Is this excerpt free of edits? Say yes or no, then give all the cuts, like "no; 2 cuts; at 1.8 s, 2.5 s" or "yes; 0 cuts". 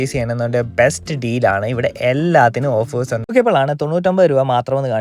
no; 1 cut; at 3.3 s